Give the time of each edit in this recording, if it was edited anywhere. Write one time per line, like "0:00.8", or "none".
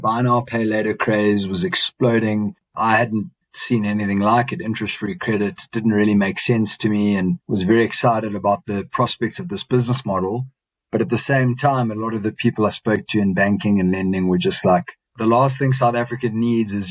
none